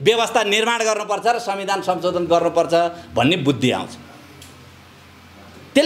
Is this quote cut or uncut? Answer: uncut